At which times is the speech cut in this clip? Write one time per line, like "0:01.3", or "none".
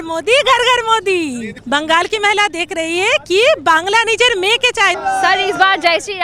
0:01.5
0:05.0

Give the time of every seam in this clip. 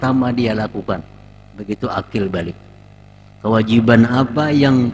none

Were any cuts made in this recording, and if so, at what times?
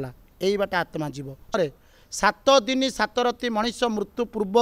0:01.6

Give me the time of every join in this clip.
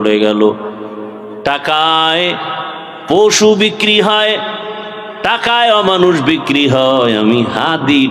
none

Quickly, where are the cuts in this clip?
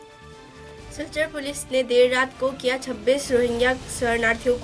0:00.9

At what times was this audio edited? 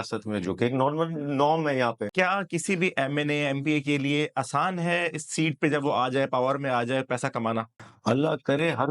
0:02.1
0:07.8

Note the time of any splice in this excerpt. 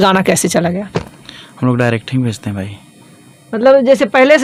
none

